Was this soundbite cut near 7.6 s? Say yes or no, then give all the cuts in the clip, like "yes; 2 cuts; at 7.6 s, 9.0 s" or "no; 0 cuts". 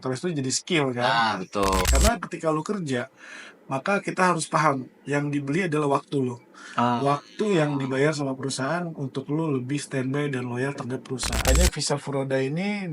no; 2 cuts; at 1.8 s, 11.6 s